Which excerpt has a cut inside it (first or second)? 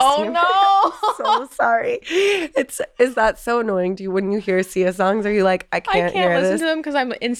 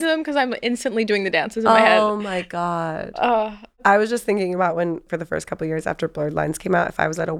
second